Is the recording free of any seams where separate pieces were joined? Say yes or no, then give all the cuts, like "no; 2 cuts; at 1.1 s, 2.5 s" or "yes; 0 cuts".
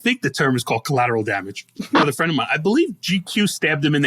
no; 1 cut; at 2.0 s